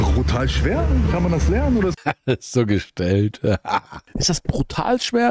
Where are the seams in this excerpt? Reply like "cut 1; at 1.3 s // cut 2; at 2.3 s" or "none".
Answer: cut 1; at 2.1 s // cut 2; at 4.1 s

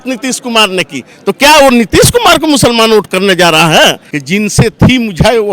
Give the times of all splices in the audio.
cut 1; at 4.1 s

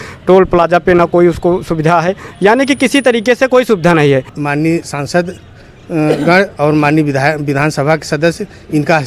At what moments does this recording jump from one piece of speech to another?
cut 1; at 4.4 s

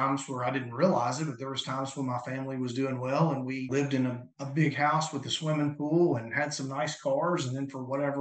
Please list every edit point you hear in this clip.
cut 1; at 3.7 s

